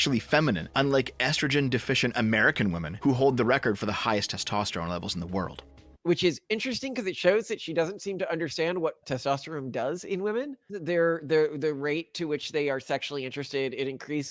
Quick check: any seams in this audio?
yes; 2 cuts; at 6.0 s, 10.8 s

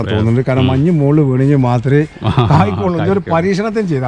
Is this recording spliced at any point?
no; 0 cuts

